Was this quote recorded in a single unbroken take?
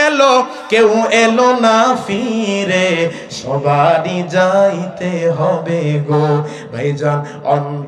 yes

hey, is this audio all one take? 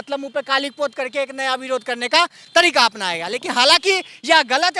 yes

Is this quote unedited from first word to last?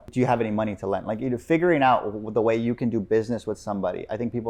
yes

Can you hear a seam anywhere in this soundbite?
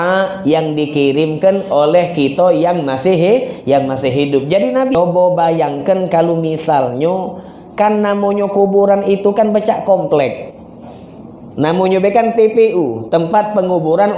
yes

